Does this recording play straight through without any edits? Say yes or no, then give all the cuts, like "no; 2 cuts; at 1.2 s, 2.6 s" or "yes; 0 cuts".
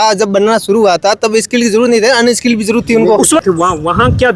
no; 1 cut; at 3.4 s